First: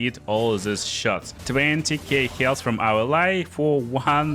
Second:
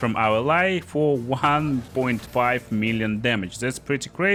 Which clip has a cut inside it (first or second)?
first